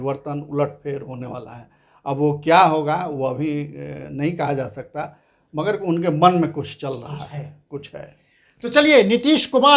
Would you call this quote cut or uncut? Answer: uncut